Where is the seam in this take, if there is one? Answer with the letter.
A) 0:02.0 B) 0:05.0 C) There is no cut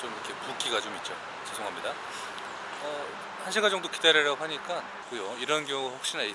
B